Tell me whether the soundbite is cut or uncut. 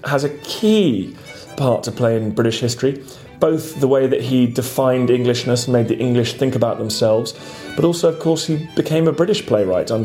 cut